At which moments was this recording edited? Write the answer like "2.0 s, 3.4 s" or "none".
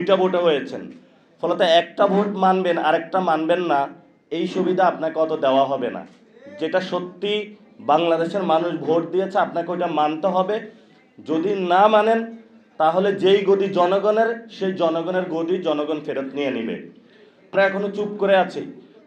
17.5 s